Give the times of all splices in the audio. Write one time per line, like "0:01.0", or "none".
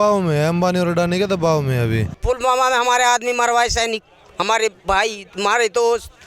0:02.2